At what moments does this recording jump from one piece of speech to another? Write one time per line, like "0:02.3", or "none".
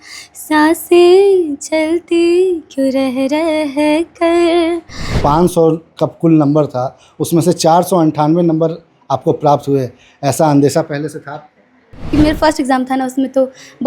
0:05.2
0:11.9